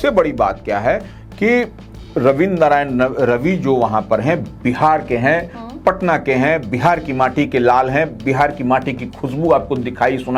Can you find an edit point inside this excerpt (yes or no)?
no